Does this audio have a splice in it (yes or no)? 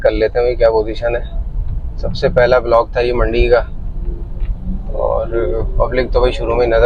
no